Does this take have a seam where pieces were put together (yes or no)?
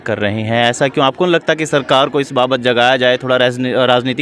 no